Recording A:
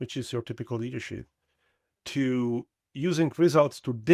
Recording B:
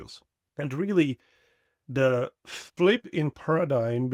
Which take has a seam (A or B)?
A